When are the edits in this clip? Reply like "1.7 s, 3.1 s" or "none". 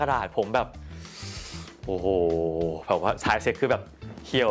none